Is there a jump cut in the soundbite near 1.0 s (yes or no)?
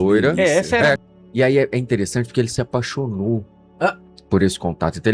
yes